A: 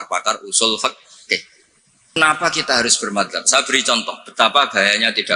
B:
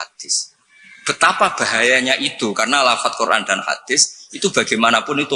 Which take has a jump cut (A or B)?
A